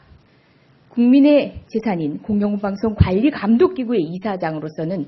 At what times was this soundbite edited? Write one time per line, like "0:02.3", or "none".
0:01.6